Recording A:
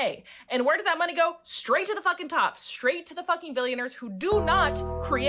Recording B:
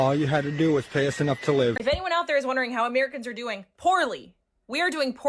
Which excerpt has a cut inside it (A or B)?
B